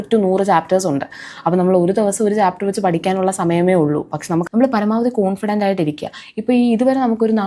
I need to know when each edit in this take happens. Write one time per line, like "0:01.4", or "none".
0:04.4